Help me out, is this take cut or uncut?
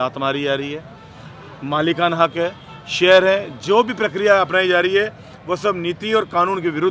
uncut